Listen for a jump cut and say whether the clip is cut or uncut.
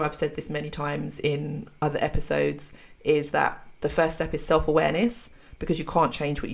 uncut